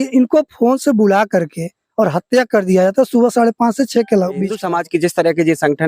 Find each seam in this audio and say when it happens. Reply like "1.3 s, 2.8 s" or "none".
4.6 s